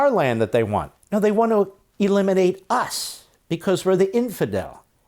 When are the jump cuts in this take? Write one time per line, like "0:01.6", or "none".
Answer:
0:00.9